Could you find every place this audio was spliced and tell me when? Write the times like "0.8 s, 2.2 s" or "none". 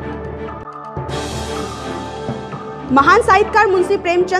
2.5 s